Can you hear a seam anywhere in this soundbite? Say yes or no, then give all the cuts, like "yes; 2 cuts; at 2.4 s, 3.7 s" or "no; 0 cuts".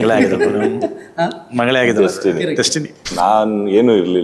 yes; 1 cut; at 3.1 s